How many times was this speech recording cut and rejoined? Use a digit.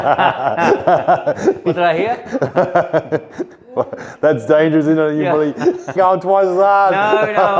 1